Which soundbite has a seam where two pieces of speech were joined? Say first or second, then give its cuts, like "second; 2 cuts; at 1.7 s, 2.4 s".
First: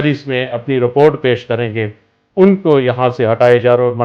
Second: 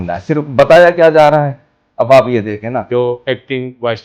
second; 1 cut; at 2.9 s